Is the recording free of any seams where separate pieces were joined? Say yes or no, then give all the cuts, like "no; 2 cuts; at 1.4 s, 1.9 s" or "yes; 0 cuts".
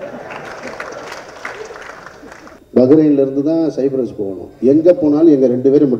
no; 1 cut; at 2.5 s